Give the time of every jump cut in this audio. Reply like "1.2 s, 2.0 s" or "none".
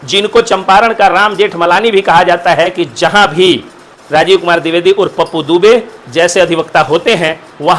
2.8 s